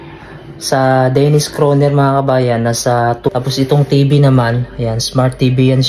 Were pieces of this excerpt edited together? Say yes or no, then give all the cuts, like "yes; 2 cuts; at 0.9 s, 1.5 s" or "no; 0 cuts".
yes; 1 cut; at 3.3 s